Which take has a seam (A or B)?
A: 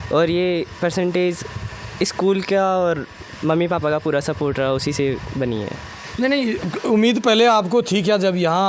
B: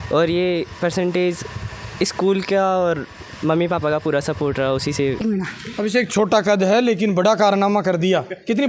B